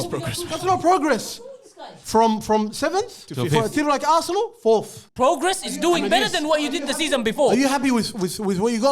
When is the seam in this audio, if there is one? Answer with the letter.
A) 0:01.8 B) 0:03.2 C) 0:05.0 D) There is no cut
C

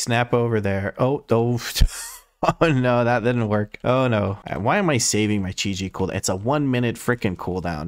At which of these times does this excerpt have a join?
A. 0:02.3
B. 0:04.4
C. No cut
B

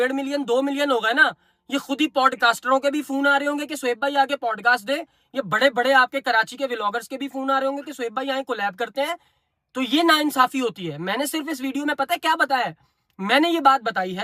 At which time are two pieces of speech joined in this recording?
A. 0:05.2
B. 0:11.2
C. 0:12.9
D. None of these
D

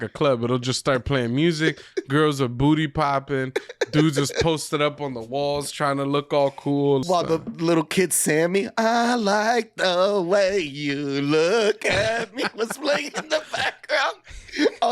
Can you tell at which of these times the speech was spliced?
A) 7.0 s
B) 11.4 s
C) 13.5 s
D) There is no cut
A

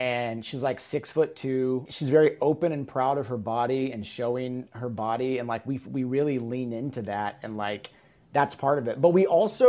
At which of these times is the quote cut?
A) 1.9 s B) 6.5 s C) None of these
A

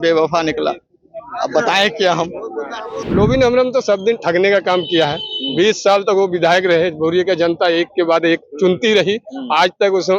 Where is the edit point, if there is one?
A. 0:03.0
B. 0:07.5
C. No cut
A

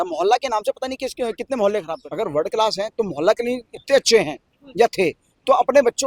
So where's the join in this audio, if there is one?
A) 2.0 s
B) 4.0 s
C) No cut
A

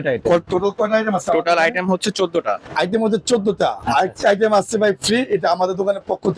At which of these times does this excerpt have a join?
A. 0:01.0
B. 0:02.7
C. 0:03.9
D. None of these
B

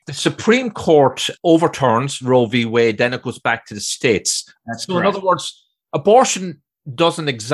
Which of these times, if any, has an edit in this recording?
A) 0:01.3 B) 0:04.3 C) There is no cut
A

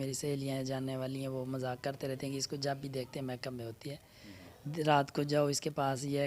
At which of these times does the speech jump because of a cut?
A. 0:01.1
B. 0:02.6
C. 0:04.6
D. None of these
D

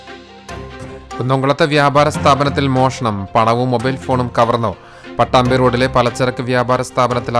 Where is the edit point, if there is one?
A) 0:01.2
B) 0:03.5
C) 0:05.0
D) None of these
D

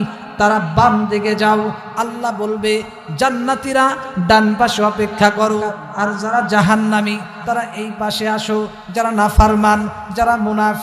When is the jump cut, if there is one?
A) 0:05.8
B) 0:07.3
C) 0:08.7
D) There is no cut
A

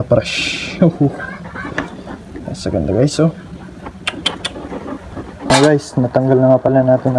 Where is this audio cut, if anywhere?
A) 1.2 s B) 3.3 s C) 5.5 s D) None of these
C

